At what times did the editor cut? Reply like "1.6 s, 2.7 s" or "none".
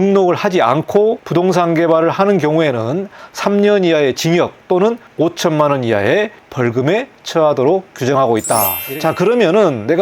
1.2 s, 8.8 s